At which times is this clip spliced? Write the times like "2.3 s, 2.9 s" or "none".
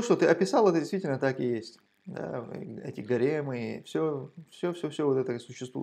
none